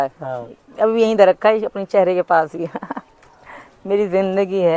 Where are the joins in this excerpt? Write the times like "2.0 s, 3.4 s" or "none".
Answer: none